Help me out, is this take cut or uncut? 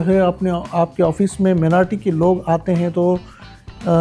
uncut